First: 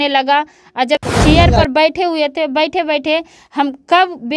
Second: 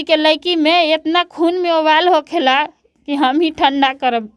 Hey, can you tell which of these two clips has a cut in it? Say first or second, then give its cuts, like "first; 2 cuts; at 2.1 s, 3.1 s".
first; 1 cut; at 1.0 s